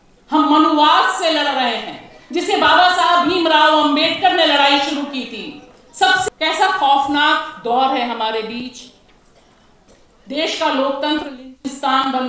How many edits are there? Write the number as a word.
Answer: one